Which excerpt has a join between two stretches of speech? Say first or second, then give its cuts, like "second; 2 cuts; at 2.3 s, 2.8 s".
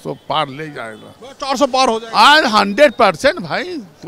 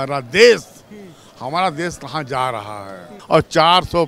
second; 1 cut; at 3.1 s